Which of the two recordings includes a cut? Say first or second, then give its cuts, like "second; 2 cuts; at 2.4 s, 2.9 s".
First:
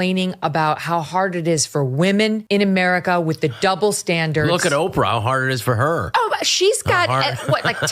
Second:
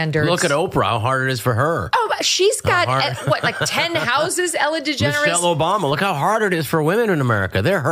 first; 1 cut; at 2.4 s